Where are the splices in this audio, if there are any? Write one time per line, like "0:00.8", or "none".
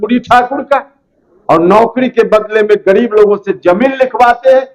none